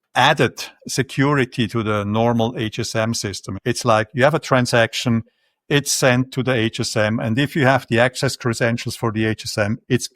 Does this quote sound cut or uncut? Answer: cut